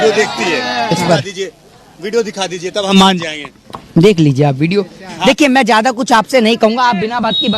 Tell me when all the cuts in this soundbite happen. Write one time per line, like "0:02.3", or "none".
0:00.9
0:05.2